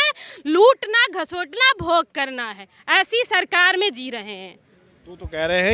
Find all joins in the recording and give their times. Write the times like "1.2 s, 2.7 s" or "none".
none